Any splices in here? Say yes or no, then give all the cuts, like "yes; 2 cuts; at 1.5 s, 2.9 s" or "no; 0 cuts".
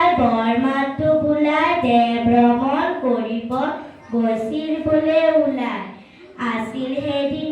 no; 0 cuts